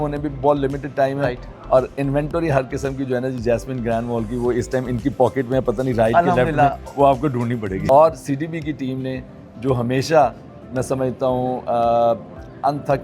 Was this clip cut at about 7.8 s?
yes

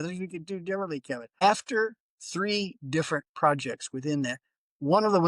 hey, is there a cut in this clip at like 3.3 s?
no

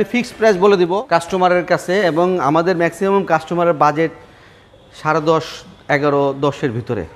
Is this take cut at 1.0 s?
yes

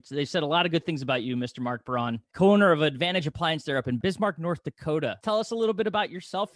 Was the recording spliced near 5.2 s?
yes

